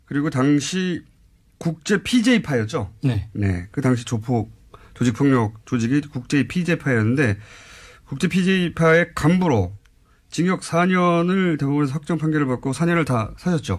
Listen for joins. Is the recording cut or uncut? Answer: uncut